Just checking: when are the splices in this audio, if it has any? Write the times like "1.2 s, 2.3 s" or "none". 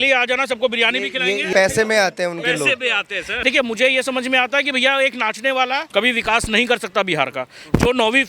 1.5 s, 3.3 s, 5.9 s